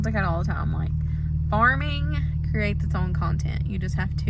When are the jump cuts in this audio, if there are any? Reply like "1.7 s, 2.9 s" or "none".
none

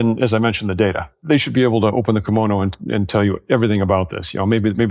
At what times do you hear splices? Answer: 1.1 s

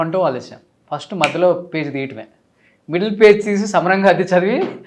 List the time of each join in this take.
none

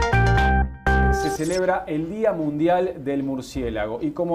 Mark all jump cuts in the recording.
1.2 s

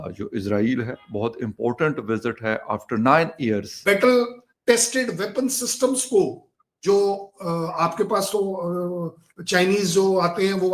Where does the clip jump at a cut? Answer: 3.7 s

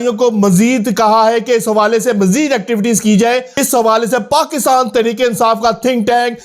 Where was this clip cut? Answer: 3.5 s

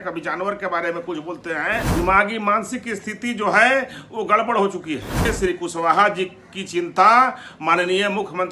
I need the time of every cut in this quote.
1.9 s, 5.2 s

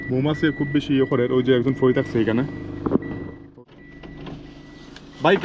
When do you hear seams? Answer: 3.5 s

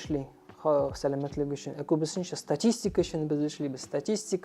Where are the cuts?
none

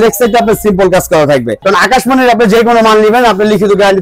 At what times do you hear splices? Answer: 1.5 s

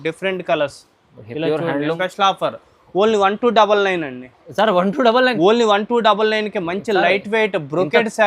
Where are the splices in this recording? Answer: 2.0 s

